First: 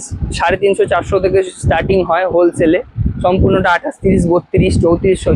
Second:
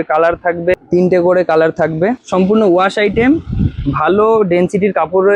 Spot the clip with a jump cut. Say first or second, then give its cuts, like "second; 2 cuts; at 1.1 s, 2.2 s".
second; 2 cuts; at 0.8 s, 2.2 s